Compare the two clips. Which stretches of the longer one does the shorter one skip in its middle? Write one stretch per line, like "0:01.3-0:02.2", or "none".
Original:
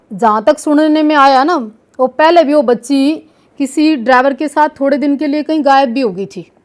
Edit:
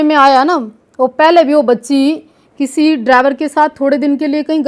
none

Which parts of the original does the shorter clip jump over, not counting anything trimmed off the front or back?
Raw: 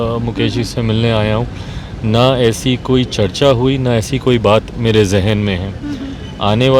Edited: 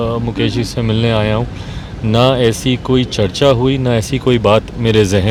none

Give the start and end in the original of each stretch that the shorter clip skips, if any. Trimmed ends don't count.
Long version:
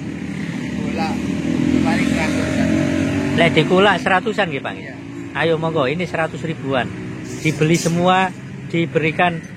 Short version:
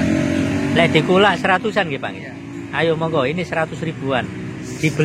none

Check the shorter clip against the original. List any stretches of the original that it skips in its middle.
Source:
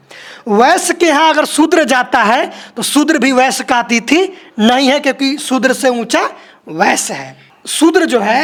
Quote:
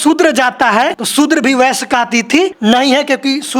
0:02.5-0:02.8
0:04.3-0:04.5

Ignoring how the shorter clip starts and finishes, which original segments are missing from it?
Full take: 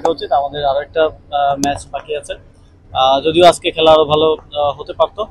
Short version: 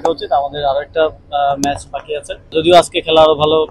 0:02.5-0:03.2

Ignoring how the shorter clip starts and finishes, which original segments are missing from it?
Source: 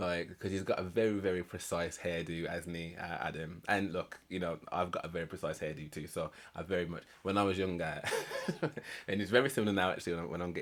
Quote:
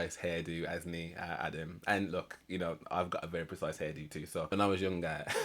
0:06.3-0:07.3

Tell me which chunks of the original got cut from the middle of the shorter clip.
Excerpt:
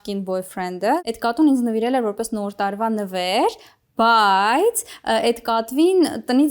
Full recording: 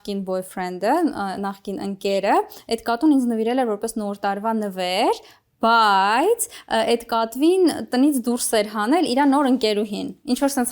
0:01.0-0:02.6

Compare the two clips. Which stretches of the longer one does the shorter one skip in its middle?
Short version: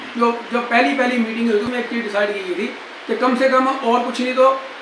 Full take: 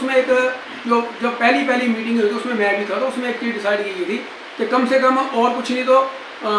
0:02.4-0:03.2

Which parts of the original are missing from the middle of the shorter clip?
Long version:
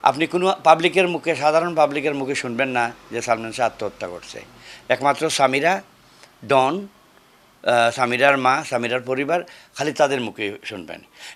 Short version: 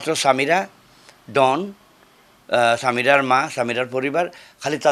none

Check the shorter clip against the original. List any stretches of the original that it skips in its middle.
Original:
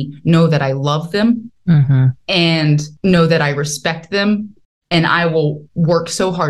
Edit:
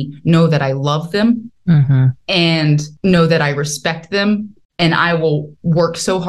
0:04.6-0:04.7

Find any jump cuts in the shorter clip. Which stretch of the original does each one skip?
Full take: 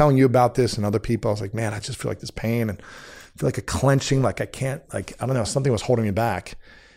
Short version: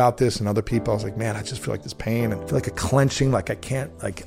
0:02.8-0:03.3

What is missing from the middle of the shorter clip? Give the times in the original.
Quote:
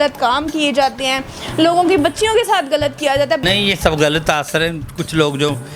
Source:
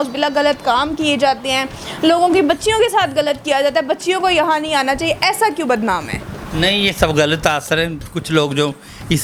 0:03.9-0:06.6

